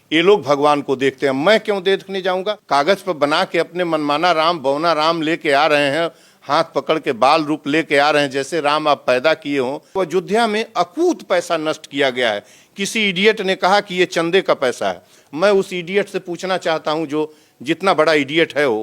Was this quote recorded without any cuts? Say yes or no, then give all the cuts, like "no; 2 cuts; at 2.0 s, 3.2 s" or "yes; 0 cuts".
no; 2 cuts; at 2.6 s, 10.0 s